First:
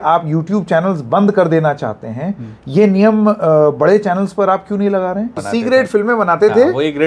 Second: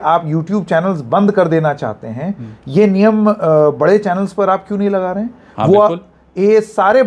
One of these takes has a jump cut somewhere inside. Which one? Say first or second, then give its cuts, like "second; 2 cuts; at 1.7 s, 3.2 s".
first; 1 cut; at 5.4 s